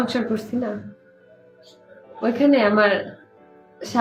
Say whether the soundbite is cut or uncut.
uncut